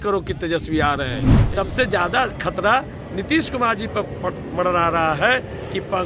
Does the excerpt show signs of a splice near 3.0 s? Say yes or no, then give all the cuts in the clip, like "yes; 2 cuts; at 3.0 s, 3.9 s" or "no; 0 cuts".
no; 1 cut; at 1.3 s